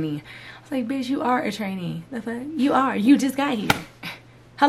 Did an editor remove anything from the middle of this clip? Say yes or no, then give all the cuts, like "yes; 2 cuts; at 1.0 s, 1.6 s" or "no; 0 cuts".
no; 0 cuts